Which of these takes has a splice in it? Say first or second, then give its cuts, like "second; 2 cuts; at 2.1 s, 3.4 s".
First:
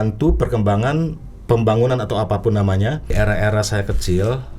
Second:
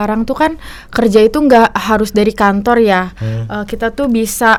first; 1 cut; at 3.1 s